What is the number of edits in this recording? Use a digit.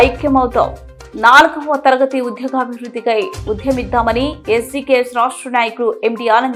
0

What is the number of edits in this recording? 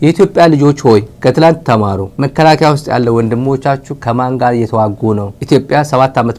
3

